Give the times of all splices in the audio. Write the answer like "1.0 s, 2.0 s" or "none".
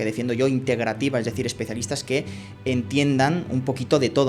none